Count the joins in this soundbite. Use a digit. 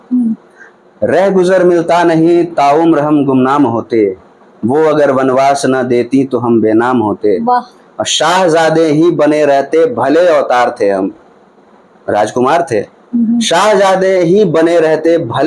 0